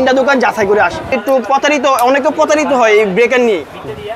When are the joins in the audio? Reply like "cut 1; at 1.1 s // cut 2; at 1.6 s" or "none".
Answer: cut 1; at 1.2 s